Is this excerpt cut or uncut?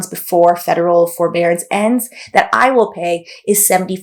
uncut